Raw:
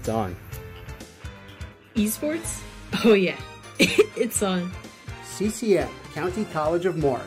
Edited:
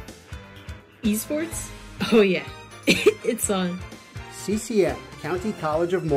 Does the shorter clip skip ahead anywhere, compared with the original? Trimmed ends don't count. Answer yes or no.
no